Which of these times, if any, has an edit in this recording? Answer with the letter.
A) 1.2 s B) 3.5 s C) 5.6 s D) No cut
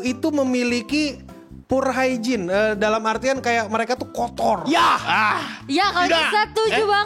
D